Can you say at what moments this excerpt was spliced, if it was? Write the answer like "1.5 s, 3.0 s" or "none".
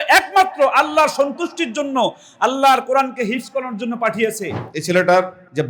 4.7 s